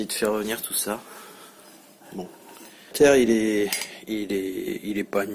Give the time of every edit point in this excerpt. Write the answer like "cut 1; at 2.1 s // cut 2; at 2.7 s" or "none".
cut 1; at 2.9 s